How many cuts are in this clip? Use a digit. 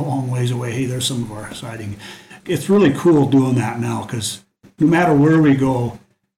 1